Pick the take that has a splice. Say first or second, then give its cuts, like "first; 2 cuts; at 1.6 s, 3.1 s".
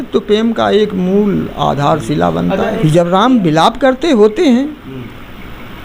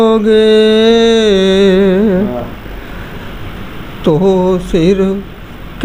first; 1 cut; at 2.8 s